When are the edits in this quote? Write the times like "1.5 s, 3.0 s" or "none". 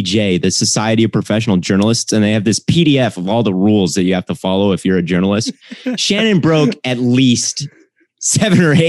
none